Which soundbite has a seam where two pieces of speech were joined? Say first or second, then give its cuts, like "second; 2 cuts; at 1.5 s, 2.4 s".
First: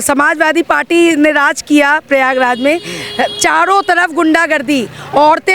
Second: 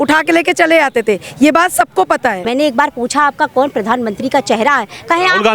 second; 1 cut; at 2.4 s